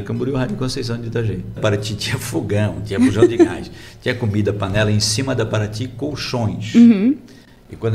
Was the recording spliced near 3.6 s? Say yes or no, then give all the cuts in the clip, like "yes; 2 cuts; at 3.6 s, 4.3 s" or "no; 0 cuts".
no; 1 cut; at 1.6 s